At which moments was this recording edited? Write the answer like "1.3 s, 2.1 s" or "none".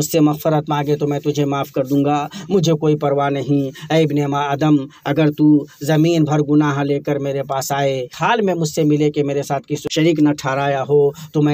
8.1 s, 9.8 s